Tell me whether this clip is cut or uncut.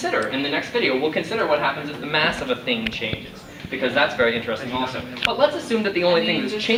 uncut